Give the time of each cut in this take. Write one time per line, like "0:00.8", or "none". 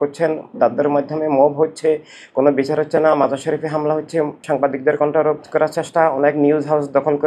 0:04.4